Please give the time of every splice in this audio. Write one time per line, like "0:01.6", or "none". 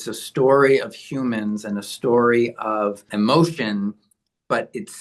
0:03.1